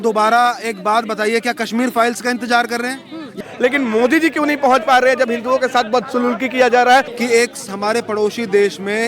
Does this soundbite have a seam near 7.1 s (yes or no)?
yes